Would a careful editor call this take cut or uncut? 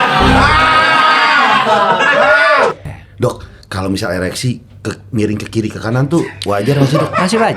cut